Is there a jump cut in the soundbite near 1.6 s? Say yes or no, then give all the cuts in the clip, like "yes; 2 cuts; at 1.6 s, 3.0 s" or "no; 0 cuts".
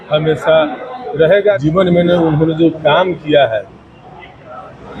yes; 1 cut; at 1.6 s